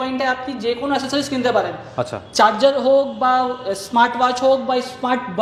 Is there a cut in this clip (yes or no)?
no